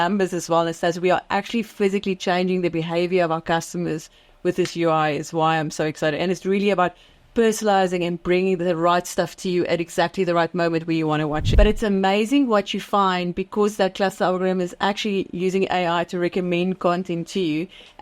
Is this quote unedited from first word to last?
no; 1 cut; at 11.4 s

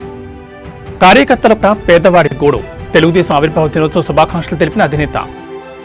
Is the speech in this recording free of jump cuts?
yes; 0 cuts

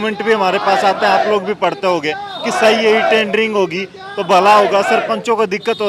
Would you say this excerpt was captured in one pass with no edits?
yes; 0 cuts

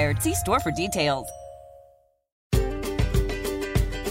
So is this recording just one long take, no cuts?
no; 1 cut; at 2.5 s

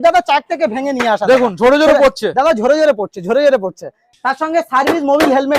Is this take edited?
yes; 1 cut; at 4.1 s

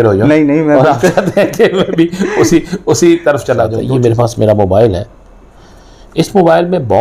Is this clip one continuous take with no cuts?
no; 1 cut; at 3.8 s

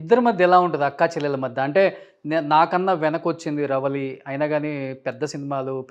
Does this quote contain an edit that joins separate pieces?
no; 0 cuts

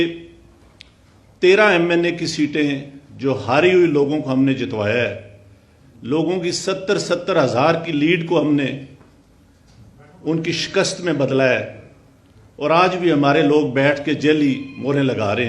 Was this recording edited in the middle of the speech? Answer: no; 0 cuts

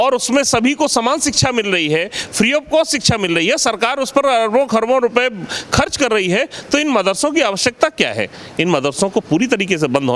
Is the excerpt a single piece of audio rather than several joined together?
yes; 0 cuts

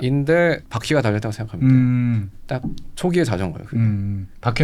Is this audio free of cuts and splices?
yes; 0 cuts

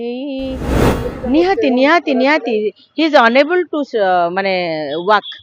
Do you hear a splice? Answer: yes; 1 cut; at 0.9 s

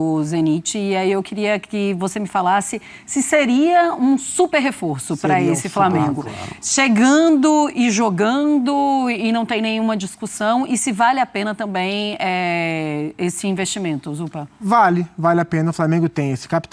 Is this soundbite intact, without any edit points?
yes; 0 cuts

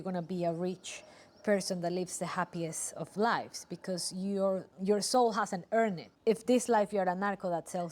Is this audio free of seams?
no; 2 cuts; at 4.7 s, 6.1 s

